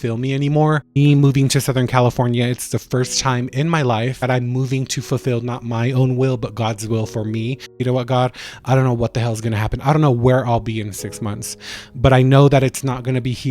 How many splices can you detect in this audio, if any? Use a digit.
3